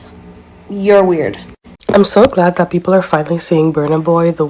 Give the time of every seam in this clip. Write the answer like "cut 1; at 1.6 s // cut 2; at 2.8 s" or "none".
cut 1; at 1.7 s